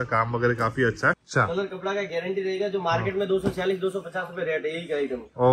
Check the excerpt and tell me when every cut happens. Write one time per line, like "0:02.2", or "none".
0:01.2